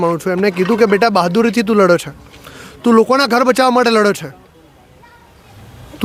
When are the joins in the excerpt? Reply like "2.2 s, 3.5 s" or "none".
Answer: none